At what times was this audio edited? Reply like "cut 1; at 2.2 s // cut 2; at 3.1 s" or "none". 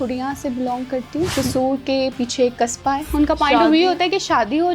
cut 1; at 1.3 s // cut 2; at 3.1 s